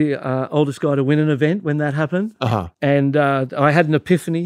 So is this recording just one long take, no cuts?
no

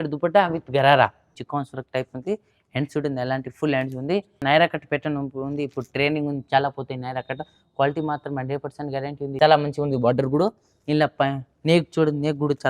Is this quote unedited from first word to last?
no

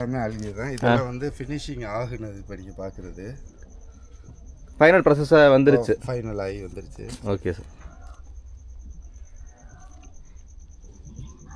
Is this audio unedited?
yes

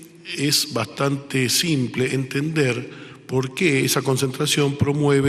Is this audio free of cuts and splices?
no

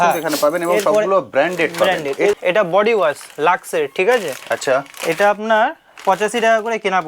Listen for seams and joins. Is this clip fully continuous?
no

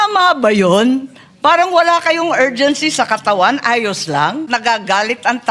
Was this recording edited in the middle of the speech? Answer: yes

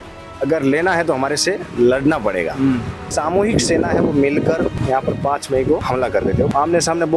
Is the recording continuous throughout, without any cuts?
no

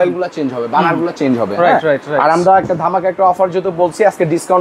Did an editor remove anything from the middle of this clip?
no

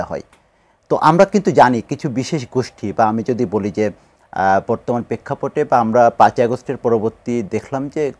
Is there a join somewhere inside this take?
no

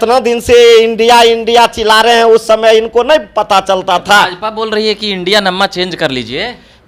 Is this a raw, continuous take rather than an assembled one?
yes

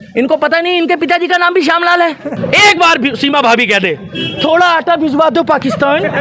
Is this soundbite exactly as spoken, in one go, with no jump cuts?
no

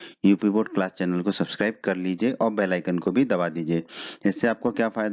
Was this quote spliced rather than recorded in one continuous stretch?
no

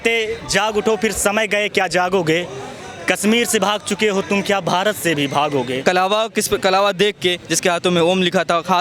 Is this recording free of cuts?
no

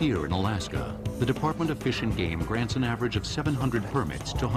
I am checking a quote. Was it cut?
no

